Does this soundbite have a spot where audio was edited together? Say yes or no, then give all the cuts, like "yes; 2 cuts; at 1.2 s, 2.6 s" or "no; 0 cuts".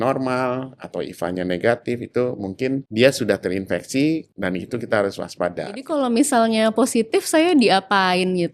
yes; 3 cuts; at 2.9 s, 4.3 s, 5.8 s